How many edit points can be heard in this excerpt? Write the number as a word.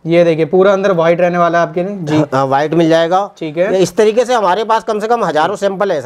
zero